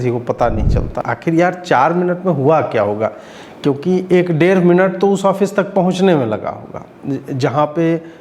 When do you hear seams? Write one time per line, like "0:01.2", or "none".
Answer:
0:01.0